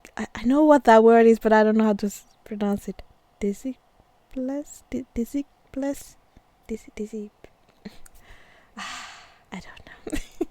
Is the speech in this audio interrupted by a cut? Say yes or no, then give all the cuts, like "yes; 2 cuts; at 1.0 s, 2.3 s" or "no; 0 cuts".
yes; 1 cut; at 9.3 s